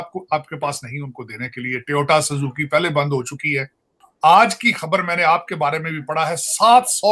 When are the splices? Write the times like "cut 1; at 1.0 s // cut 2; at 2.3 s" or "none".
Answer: cut 1; at 4.0 s